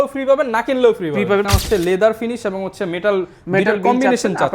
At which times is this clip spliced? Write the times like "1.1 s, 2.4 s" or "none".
1.5 s